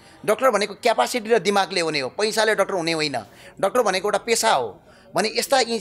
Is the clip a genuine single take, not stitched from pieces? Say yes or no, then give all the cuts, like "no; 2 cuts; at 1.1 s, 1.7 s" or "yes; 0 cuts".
yes; 0 cuts